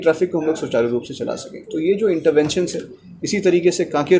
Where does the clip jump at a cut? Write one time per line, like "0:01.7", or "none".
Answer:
none